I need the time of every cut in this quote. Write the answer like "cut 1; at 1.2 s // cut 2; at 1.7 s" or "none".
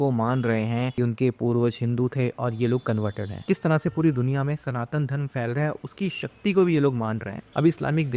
none